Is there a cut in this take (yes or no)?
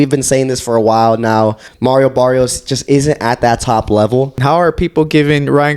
yes